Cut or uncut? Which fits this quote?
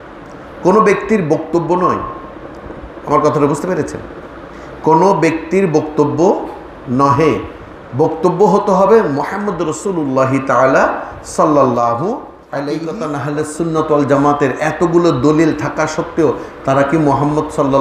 cut